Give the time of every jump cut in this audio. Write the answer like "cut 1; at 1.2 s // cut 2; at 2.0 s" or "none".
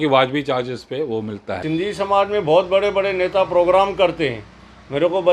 cut 1; at 1.6 s